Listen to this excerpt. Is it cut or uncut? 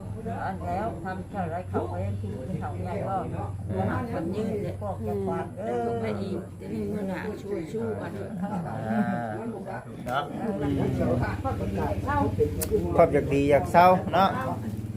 cut